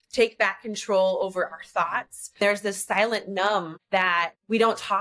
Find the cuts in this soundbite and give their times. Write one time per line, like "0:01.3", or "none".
0:02.4
0:04.0